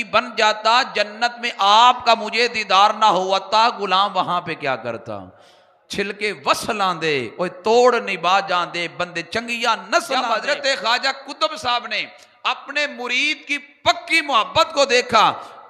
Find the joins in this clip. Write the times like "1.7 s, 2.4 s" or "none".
10.2 s